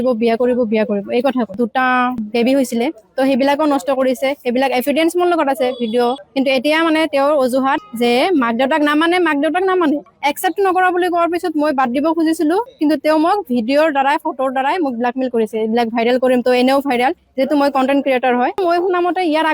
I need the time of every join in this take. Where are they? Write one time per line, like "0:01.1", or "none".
0:01.5
0:06.2
0:10.1
0:18.6